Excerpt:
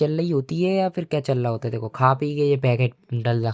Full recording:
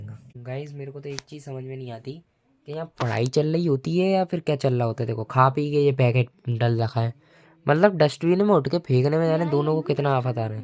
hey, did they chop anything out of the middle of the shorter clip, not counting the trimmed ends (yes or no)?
no